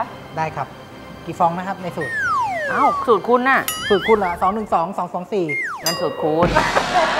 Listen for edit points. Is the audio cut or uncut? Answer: uncut